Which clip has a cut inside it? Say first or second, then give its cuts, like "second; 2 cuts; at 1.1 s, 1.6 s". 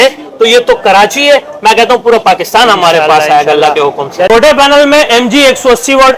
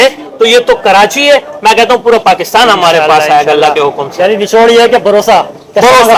first; 1 cut; at 4.3 s